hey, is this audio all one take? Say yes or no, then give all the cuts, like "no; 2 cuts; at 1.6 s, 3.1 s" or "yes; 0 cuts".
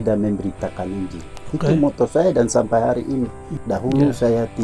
no; 1 cut; at 3.6 s